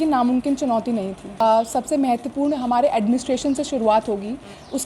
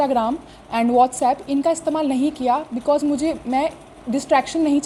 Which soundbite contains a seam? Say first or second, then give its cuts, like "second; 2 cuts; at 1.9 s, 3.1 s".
first; 1 cut; at 1.4 s